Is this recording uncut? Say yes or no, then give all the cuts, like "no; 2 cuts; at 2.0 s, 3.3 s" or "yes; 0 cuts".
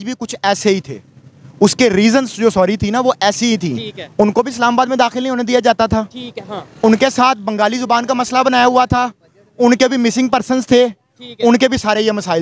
yes; 0 cuts